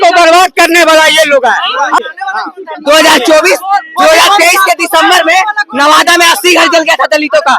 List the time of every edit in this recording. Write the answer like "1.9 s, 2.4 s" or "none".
2.0 s